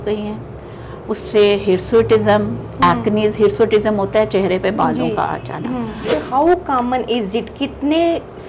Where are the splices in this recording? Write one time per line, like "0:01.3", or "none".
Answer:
0:06.0